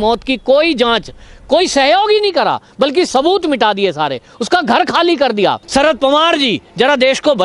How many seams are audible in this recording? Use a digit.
1